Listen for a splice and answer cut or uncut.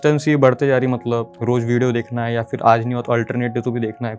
cut